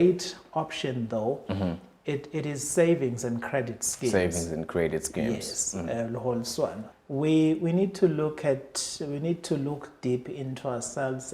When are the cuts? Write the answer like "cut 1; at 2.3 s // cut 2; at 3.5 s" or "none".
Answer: cut 1; at 6.9 s